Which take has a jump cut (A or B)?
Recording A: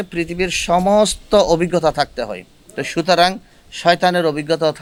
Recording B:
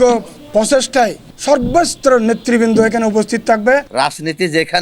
B